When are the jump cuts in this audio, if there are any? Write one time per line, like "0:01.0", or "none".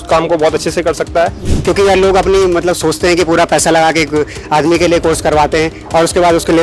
0:01.5